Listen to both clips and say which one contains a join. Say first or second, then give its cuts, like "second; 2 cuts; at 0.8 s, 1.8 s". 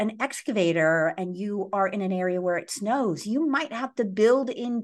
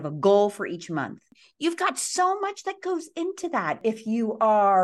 second; 2 cuts; at 1.4 s, 3.8 s